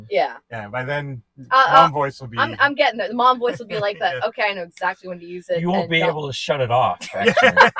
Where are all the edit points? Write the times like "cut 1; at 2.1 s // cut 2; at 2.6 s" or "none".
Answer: none